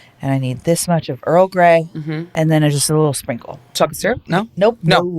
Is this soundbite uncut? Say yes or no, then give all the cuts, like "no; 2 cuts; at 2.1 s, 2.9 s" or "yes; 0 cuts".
no; 2 cuts; at 2.2 s, 3.8 s